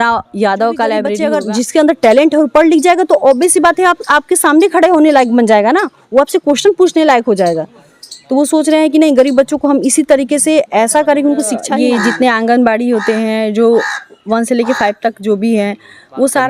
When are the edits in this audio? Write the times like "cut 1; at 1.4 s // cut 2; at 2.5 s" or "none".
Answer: cut 1; at 1.2 s // cut 2; at 11.7 s